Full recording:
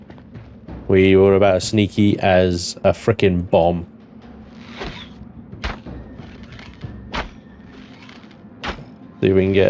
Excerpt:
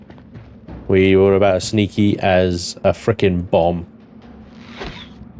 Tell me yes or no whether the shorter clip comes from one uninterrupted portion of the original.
yes